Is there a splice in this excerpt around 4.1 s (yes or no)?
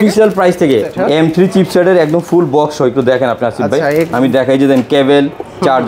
no